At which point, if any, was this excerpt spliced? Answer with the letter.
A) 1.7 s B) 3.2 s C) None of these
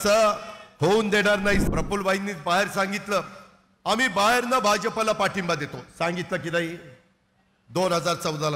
A